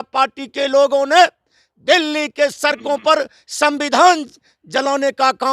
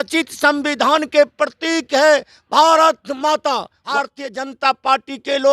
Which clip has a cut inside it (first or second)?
second